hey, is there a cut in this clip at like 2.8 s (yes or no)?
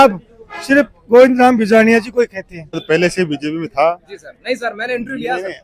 yes